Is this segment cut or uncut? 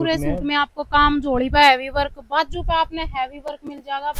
uncut